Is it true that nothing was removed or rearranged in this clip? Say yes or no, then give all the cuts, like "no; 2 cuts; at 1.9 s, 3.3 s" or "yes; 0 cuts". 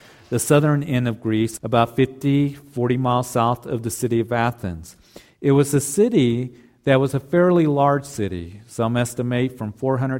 no; 1 cut; at 1.5 s